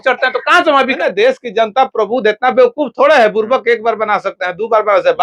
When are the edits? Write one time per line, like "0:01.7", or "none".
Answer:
0:01.0